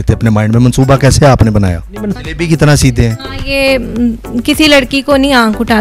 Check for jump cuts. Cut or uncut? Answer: cut